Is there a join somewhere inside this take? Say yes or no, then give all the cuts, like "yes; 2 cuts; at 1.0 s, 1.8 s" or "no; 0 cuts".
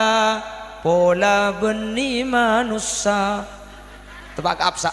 no; 0 cuts